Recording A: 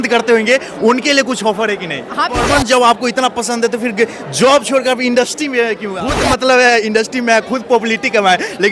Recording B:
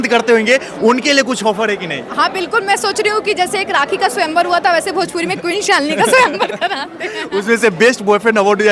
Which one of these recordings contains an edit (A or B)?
A